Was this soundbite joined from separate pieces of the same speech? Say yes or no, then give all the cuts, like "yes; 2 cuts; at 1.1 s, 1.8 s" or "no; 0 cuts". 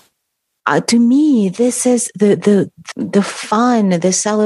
yes; 1 cut; at 2.8 s